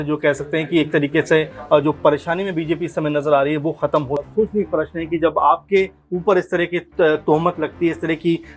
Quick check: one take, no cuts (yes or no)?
no